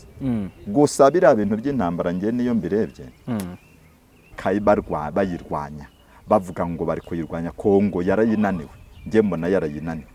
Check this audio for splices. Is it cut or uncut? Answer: cut